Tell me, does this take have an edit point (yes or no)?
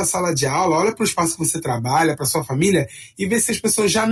no